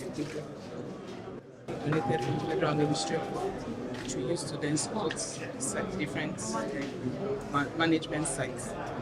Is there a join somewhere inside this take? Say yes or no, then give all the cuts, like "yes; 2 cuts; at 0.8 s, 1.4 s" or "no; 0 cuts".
yes; 1 cut; at 1.7 s